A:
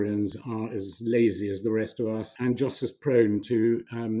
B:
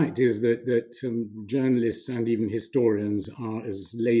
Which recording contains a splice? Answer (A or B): A